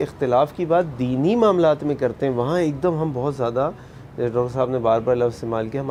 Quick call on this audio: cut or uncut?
uncut